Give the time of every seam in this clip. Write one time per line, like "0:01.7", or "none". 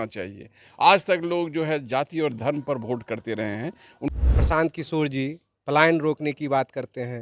0:04.1